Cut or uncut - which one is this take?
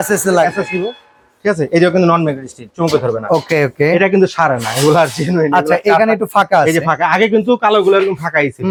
uncut